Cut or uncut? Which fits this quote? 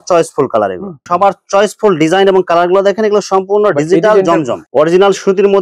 cut